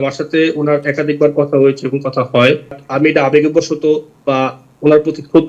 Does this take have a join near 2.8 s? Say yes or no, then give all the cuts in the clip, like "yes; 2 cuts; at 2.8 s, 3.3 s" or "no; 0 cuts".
yes; 1 cut; at 2.8 s